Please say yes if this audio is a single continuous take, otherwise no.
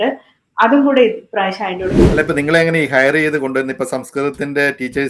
no